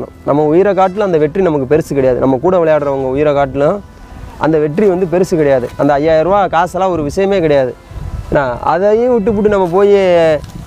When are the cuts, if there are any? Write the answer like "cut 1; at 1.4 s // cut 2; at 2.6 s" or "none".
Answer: none